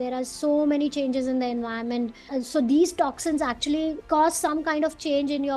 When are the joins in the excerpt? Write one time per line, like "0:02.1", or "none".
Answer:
none

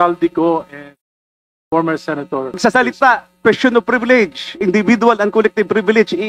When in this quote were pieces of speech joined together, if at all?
0:02.6

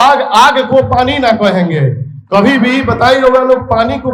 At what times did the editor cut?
none

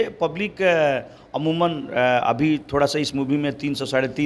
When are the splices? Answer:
none

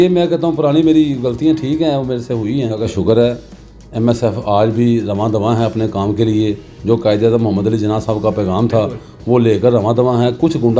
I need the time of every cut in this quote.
0:02.9

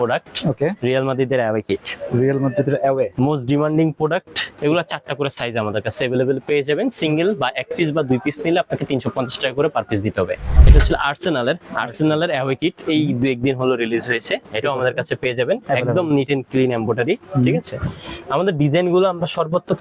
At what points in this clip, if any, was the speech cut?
0:04.4
0:10.5

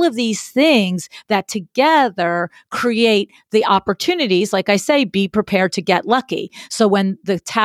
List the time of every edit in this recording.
none

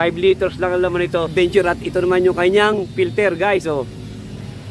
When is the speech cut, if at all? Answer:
0:01.3

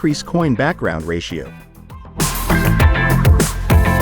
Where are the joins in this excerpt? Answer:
0:02.2

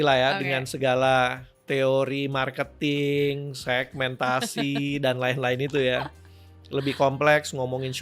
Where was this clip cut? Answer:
none

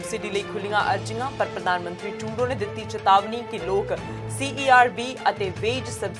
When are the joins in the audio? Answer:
none

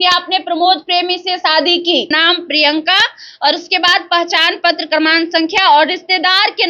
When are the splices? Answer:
0:02.1

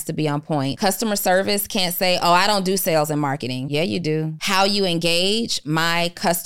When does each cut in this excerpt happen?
0:00.7
0:03.6
0:04.4

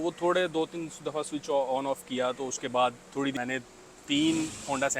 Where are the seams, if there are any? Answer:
0:03.3

